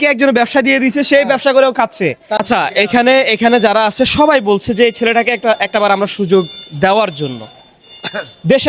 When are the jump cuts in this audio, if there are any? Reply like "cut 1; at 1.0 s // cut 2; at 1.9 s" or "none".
cut 1; at 2.4 s

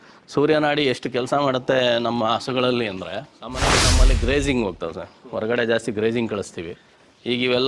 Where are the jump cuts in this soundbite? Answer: cut 1; at 3.8 s

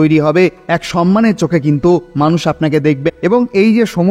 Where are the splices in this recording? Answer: cut 1; at 3.1 s

